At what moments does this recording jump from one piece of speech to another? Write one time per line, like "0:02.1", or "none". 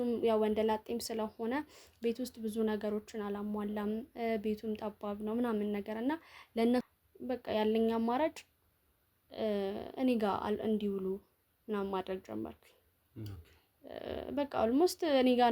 0:06.9